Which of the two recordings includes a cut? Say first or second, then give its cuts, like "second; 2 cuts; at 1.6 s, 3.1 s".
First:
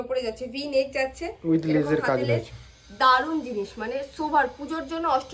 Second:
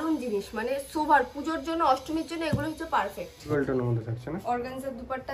second; 1 cut; at 3.5 s